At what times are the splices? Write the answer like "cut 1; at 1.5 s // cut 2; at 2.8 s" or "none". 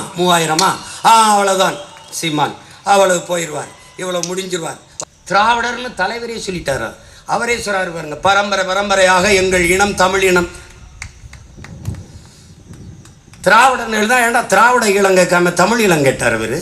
cut 1; at 4.9 s

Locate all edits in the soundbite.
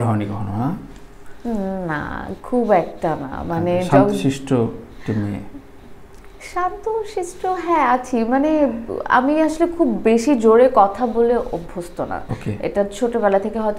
none

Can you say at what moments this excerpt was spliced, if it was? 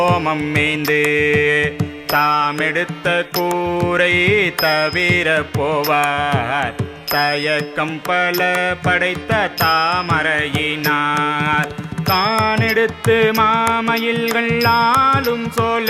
cut 1; at 6.9 s

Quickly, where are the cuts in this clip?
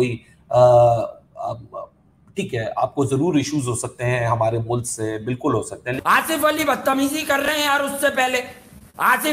cut 1; at 5.9 s

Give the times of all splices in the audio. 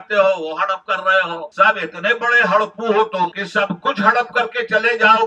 cut 1; at 1.5 s // cut 2; at 3.4 s

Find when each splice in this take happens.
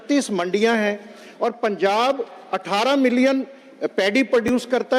none

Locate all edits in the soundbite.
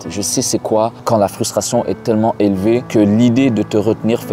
cut 1; at 1.0 s // cut 2; at 2.9 s

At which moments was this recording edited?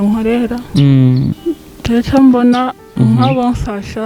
cut 1; at 1.4 s

